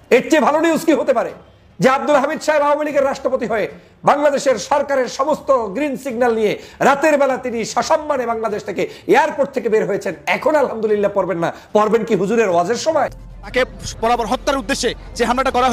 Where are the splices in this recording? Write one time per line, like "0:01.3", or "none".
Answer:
0:13.2